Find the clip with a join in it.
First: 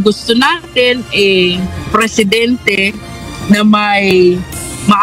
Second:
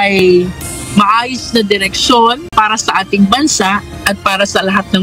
second; 1 cut; at 2.4 s

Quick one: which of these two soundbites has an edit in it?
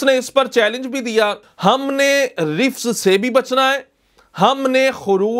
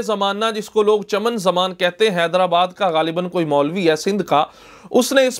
first; 1 cut; at 1.4 s

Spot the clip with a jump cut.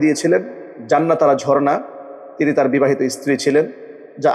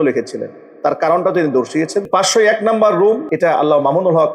second; 2 cuts; at 2.1 s, 3.3 s

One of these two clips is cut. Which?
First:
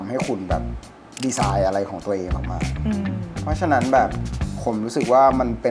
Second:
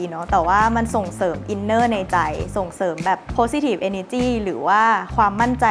second; 1 cut; at 3.3 s

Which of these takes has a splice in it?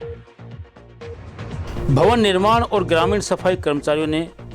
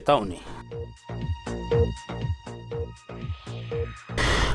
first; 1 cut; at 1.8 s

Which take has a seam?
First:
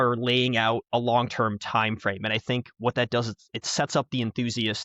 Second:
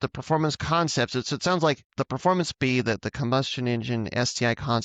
second; 1 cut; at 1.9 s

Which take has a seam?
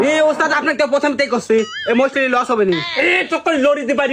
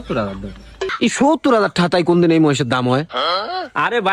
second; 1 cut; at 0.9 s

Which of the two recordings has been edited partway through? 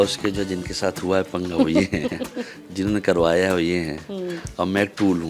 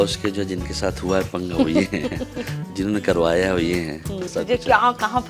second; 1 cut; at 4.3 s

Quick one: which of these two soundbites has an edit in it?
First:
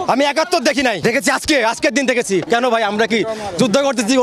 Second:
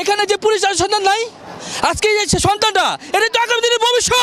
first; 2 cuts; at 1.0 s, 2.4 s

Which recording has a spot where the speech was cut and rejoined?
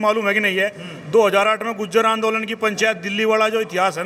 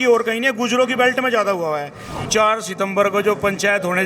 second; 1 cut; at 2.3 s

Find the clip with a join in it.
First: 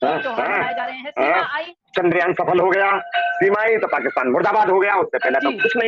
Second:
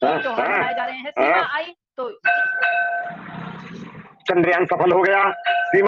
first; 1 cut; at 1.8 s

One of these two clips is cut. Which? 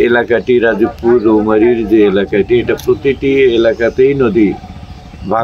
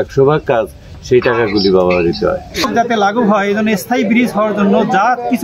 second; 1 cut; at 2.7 s

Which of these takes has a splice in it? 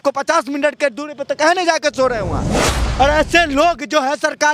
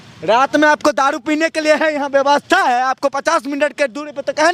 first; 1 cut; at 2.8 s

